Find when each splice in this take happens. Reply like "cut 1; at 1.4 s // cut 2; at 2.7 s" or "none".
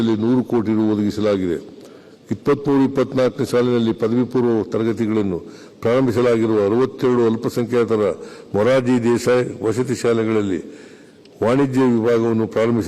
none